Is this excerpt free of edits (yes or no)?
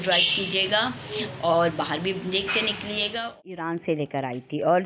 no